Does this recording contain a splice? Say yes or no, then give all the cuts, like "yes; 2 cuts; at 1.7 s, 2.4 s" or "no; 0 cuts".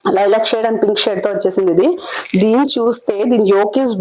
no; 0 cuts